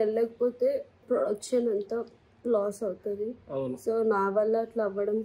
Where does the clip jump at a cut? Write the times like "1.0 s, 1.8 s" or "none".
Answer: 0.9 s